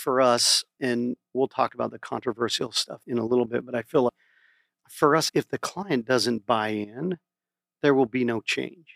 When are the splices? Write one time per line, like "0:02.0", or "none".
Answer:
0:00.9
0:02.9
0:04.1